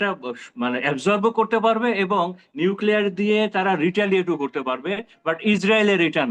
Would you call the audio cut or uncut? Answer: uncut